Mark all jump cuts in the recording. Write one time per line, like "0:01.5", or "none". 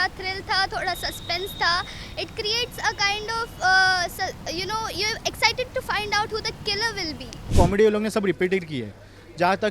0:07.5